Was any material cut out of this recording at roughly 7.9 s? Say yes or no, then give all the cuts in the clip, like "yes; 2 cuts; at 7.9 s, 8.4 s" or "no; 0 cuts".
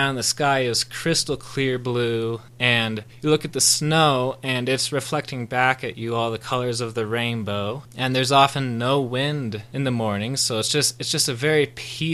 yes; 2 cuts; at 7.9 s, 9.7 s